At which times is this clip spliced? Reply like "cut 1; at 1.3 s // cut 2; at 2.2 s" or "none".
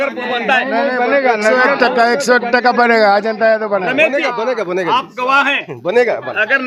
none